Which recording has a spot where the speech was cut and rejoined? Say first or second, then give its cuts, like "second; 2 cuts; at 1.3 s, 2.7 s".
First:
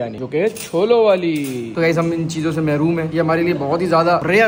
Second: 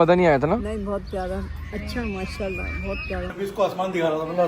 second; 1 cut; at 3.2 s